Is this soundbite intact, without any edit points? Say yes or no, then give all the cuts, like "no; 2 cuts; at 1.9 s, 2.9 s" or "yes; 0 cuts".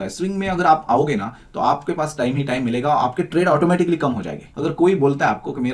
no; 1 cut; at 4.4 s